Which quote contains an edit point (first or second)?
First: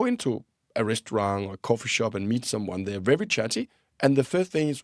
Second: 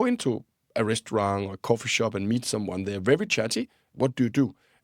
second